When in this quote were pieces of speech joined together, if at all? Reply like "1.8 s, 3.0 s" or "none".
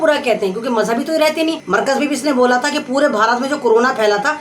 1.6 s